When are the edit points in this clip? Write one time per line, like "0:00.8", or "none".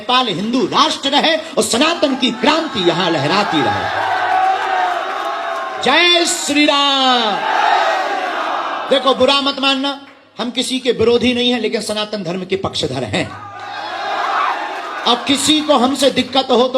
none